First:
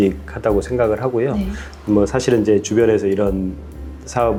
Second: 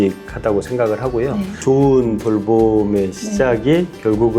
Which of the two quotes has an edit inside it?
second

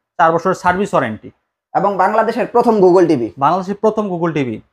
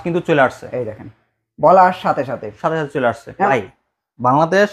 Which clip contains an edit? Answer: second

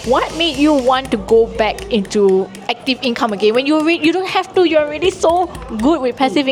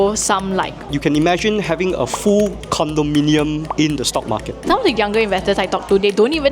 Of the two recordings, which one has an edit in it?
second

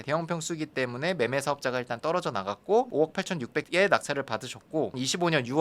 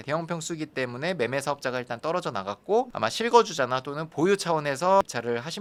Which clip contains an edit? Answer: first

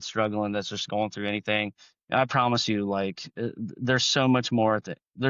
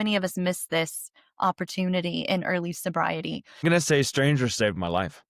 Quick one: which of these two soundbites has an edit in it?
second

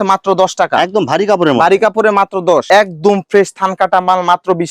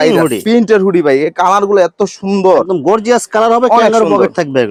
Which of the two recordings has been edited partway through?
first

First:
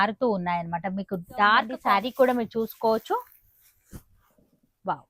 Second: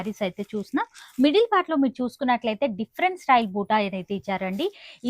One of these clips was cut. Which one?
first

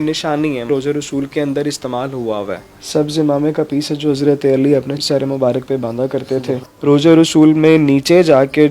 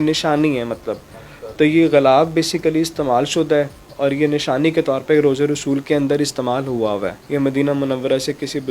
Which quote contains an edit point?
first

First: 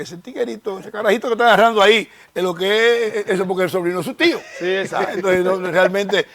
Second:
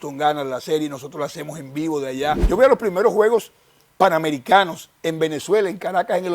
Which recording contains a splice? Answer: second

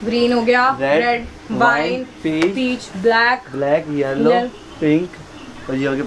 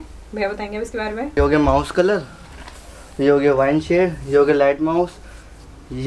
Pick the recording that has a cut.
second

